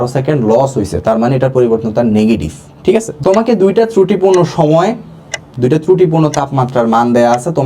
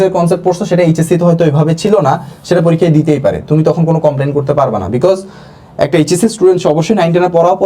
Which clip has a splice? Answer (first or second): first